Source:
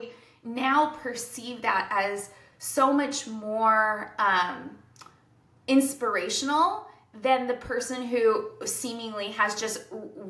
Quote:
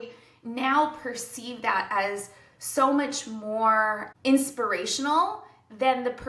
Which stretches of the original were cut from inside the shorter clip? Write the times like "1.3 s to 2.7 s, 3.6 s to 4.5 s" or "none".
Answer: 4.1 s to 5.5 s